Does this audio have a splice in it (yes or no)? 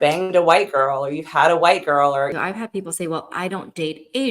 yes